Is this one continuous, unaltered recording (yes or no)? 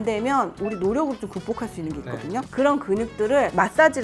no